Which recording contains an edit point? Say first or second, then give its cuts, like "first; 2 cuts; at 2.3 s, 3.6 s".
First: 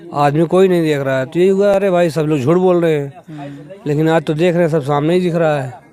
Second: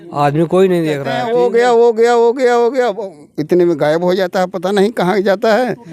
second; 1 cut; at 1.1 s